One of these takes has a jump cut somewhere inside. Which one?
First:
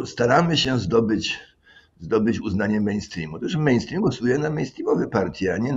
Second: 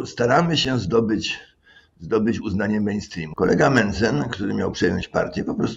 second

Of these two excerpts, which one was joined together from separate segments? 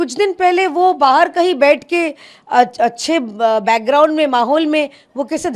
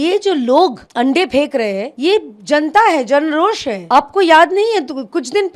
second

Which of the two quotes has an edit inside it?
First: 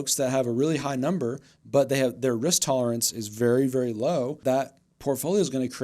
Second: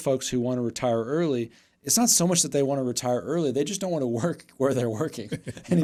first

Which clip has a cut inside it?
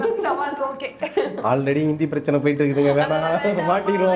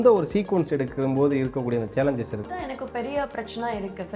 second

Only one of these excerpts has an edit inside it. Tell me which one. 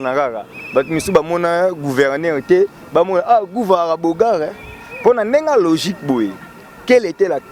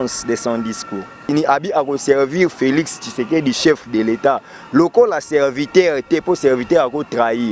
second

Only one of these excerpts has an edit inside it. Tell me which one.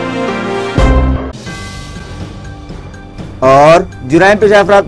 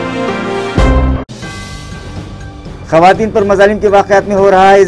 second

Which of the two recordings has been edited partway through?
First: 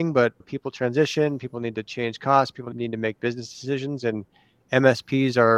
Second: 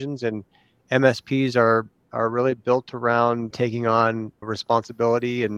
first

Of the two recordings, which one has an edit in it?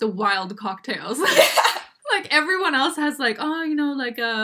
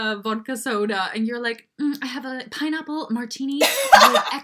first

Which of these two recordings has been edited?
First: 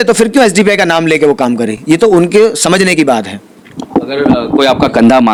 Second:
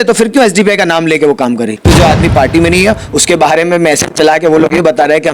second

